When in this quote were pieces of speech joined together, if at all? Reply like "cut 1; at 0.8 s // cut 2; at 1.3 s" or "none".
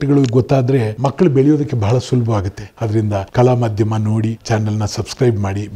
none